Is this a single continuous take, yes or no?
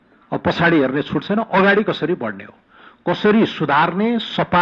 yes